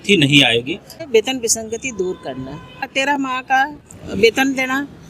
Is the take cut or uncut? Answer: cut